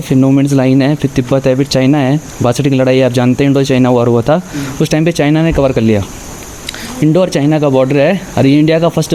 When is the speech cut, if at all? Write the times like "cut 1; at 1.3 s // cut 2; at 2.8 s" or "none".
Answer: none